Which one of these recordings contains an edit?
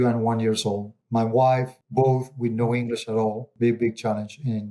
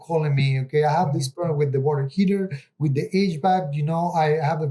first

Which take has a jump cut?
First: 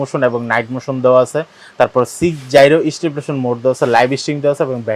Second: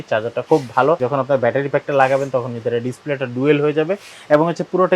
second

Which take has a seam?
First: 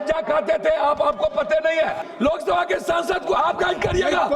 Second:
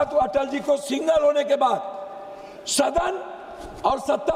first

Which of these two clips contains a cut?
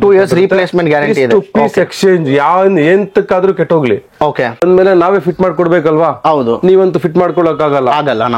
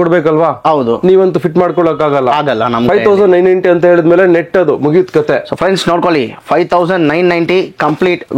first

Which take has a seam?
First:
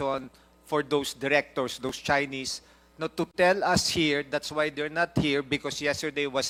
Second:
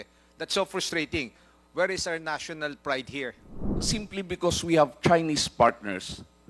second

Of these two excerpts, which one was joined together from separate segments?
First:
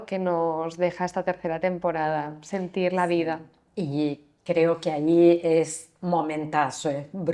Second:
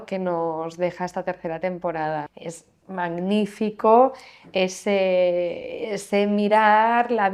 second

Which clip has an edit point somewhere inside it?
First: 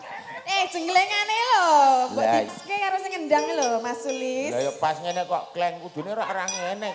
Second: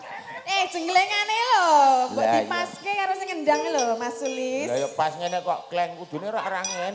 first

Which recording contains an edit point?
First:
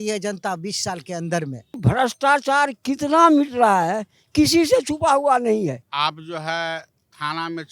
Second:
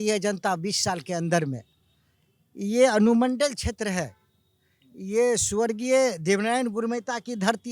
first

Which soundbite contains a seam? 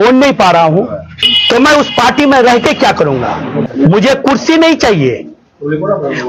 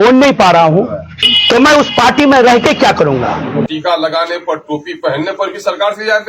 second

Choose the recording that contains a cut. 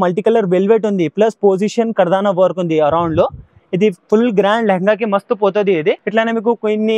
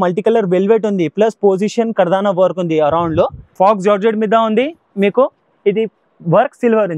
second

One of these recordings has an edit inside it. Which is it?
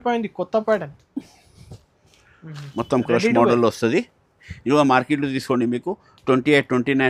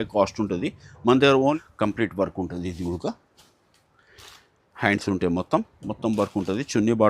second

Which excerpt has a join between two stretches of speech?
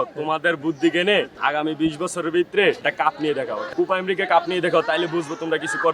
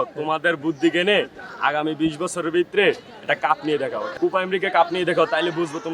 first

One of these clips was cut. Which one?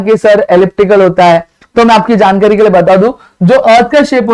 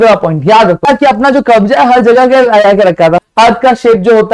second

